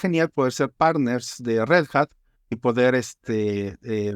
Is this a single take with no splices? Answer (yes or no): yes